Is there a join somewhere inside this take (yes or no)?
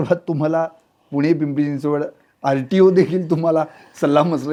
no